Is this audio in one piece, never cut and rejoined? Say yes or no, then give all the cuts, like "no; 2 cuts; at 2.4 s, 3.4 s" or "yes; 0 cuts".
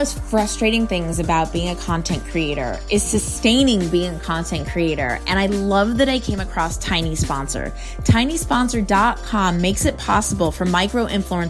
yes; 0 cuts